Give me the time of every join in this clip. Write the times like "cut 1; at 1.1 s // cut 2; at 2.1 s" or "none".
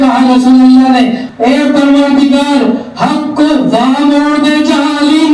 cut 1; at 1.2 s